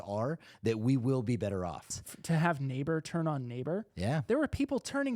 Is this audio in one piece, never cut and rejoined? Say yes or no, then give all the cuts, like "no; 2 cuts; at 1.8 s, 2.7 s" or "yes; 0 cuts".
no; 1 cut; at 1.9 s